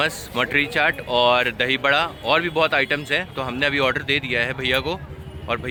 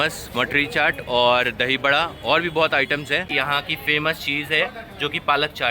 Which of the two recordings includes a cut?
second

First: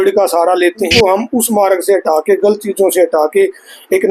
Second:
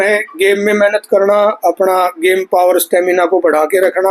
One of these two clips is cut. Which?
first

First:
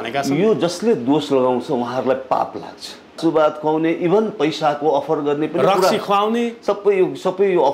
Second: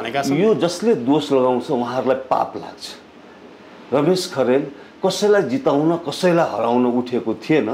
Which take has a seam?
first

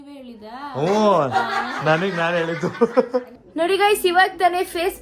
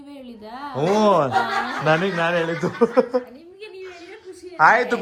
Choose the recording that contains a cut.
first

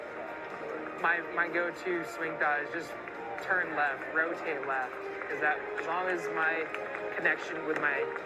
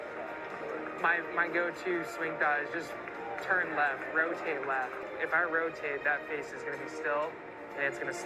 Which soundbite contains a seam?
second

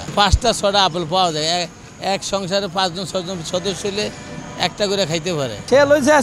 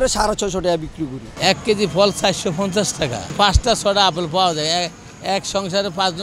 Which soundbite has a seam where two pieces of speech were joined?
second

